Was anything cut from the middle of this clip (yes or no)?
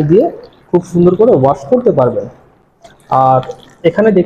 no